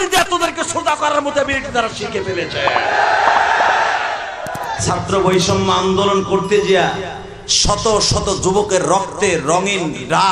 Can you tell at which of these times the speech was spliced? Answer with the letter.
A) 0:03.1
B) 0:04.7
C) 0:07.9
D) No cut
B